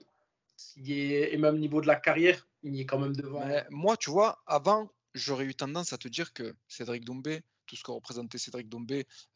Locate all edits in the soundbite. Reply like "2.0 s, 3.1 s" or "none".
3.2 s